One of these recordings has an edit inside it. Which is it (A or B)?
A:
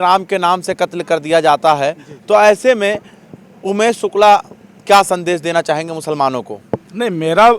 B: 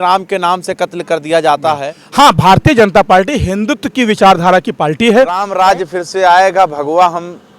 B